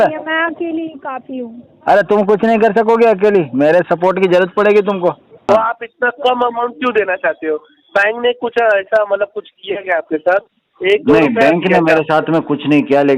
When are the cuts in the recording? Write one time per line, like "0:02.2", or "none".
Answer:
0:05.5